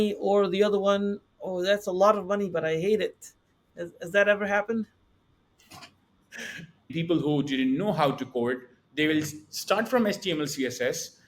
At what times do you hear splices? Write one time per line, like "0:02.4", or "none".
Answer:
0:06.9